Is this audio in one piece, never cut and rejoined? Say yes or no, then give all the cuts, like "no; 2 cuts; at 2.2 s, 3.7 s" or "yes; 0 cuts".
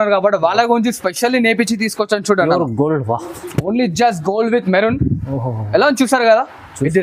yes; 0 cuts